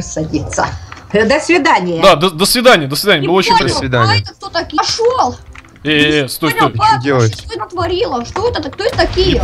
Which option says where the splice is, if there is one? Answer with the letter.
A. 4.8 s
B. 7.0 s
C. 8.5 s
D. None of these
A